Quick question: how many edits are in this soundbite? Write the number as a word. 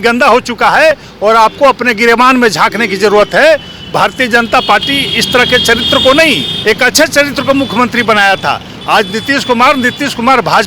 zero